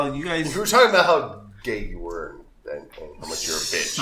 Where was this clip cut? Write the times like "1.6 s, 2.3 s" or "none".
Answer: none